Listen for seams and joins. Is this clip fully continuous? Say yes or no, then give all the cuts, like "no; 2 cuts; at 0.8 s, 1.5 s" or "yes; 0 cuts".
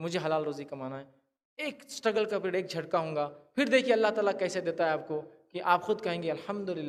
yes; 0 cuts